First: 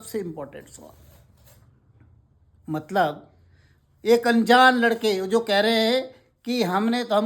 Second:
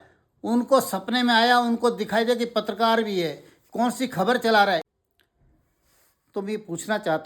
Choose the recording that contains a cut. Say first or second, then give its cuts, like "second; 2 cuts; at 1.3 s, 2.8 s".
second; 1 cut; at 4.8 s